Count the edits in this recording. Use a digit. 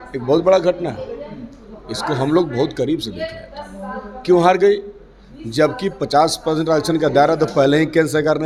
0